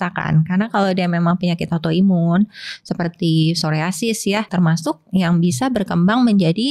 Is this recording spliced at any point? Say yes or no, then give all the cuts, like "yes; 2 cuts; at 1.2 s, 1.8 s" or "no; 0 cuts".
yes; 1 cut; at 4.5 s